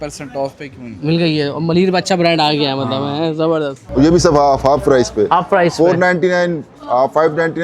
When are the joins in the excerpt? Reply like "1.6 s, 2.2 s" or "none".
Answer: none